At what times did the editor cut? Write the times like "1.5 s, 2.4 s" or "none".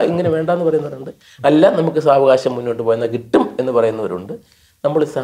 none